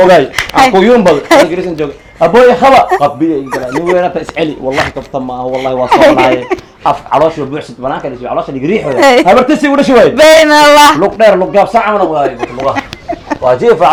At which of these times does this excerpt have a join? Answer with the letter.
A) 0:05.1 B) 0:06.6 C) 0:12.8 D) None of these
D